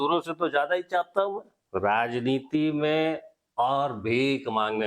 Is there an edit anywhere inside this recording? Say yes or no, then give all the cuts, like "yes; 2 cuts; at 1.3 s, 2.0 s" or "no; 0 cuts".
yes; 1 cut; at 1.5 s